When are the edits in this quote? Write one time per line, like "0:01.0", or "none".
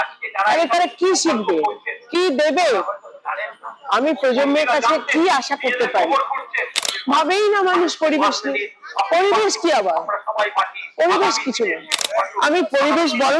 0:06.8